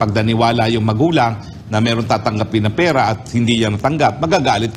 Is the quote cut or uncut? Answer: uncut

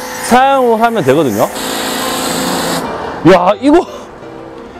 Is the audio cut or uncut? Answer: cut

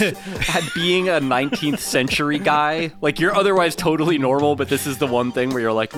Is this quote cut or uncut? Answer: uncut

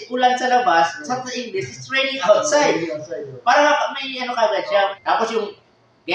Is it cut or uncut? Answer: uncut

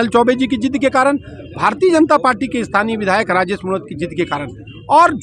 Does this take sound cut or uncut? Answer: uncut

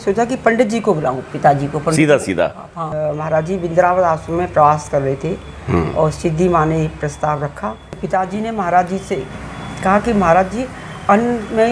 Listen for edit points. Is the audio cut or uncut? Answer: cut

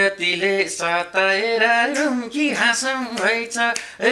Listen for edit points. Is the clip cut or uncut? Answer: uncut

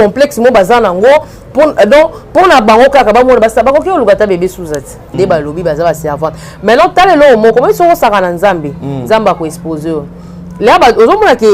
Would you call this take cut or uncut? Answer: cut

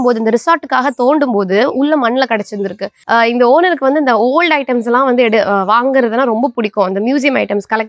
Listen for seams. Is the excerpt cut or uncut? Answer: cut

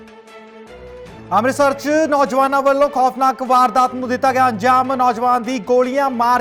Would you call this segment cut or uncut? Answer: uncut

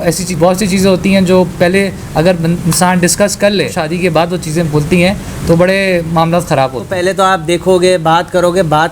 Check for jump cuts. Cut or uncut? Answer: cut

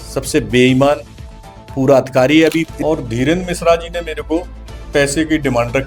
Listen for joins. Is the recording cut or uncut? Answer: cut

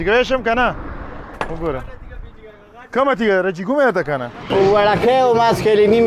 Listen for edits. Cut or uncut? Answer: cut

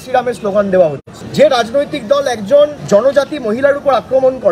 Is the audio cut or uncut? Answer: uncut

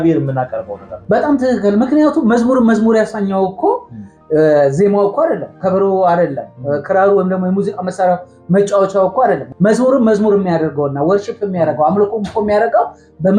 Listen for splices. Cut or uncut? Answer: cut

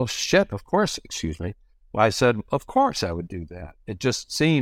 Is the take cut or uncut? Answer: uncut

